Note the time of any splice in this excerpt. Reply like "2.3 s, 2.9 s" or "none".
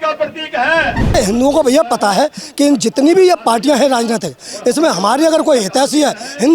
1.1 s